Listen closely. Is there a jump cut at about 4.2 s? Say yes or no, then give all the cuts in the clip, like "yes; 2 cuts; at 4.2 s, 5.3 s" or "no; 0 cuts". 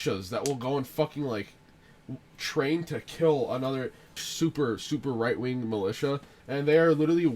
yes; 2 cuts; at 4.2 s, 6.4 s